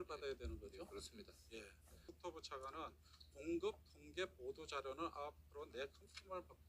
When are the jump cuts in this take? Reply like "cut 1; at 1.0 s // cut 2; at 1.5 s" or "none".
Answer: cut 1; at 2.1 s